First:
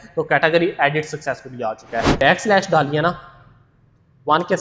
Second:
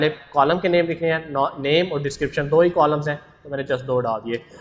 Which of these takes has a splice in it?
first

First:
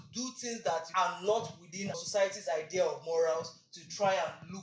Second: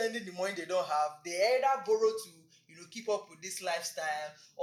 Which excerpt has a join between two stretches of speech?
first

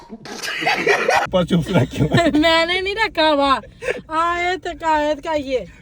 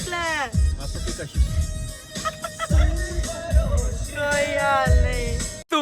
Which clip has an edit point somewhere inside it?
first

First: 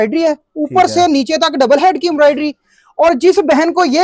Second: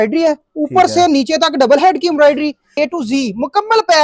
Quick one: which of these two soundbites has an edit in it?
second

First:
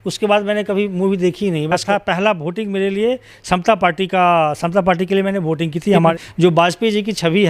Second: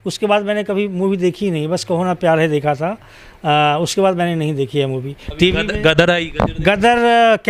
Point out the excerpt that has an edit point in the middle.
first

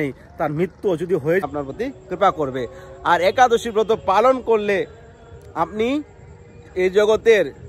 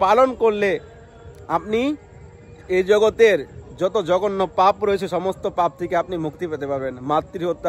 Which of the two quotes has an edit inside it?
first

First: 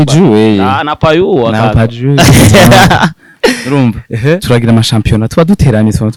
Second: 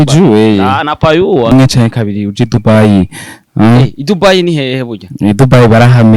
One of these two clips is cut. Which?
second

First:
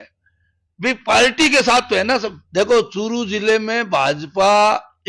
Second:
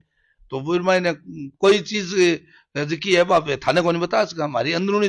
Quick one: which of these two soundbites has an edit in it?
first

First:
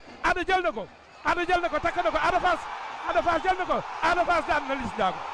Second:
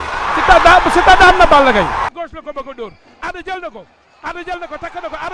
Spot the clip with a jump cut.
second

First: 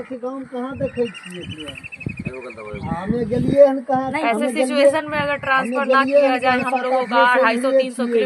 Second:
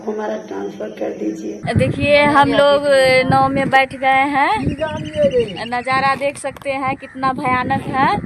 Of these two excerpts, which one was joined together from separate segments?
second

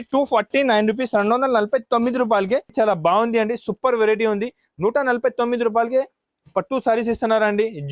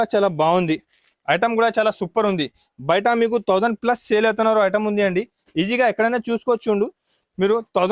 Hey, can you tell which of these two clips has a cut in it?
first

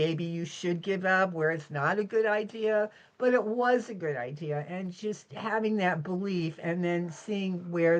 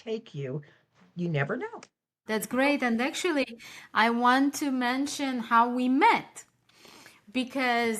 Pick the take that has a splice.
second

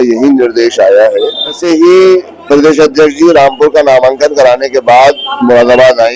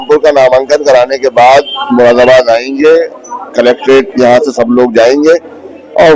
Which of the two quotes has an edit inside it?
first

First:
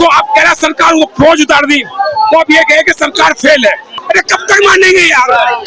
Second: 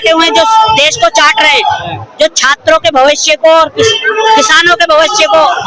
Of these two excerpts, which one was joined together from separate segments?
first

